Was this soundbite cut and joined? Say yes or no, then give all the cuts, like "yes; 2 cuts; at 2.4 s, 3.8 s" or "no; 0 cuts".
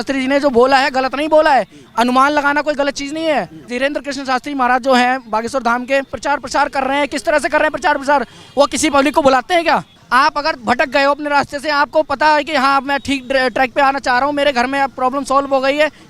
yes; 3 cuts; at 3.7 s, 6.2 s, 10.0 s